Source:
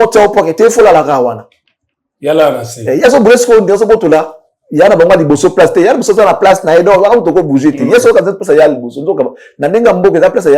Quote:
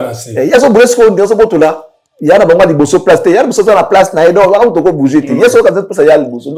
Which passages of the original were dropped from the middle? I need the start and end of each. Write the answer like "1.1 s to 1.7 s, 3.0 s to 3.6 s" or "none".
none